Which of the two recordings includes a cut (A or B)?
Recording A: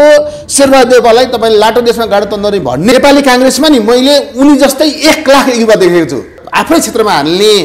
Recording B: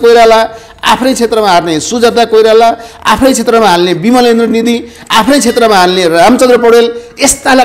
A